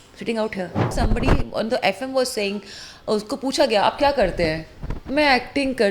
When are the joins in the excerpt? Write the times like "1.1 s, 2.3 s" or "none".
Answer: 0.9 s